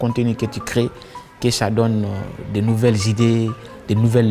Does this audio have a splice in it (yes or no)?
no